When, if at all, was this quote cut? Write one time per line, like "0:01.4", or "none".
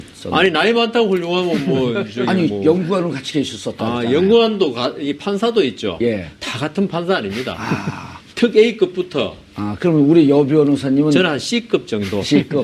0:11.3

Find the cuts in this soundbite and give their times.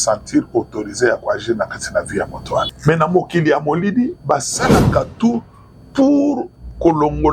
0:02.7

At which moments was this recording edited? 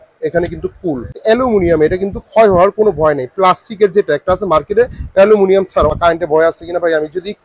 0:01.1
0:05.9

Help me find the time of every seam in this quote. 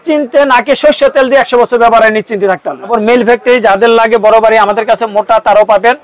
0:02.9

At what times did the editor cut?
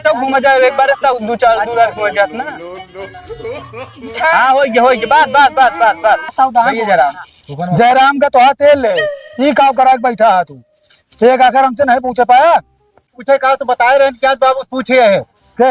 0:06.3

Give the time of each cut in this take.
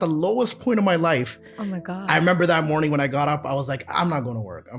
none

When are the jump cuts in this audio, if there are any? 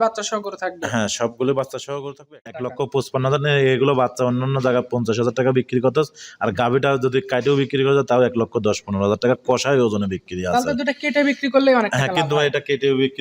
0:02.5

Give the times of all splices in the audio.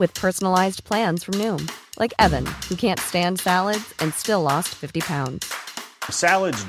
none

